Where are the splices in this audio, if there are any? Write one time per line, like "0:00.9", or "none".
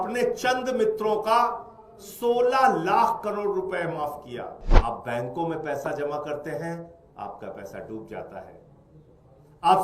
0:04.6